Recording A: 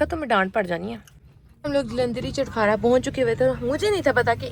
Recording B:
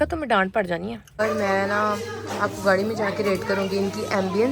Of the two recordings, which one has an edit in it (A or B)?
B